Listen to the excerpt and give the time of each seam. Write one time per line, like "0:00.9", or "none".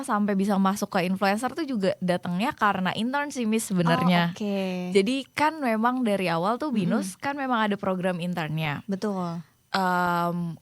none